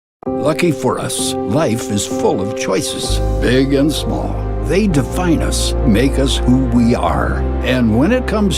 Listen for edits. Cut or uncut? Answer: cut